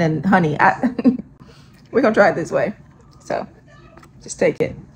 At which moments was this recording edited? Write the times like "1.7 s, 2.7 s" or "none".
none